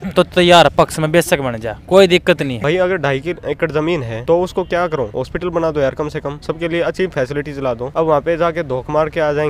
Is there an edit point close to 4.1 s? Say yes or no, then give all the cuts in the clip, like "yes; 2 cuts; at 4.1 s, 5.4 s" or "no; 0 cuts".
yes; 5 cuts; at 2.5 s, 4.1 s, 5.2 s, 6.4 s, 7.9 s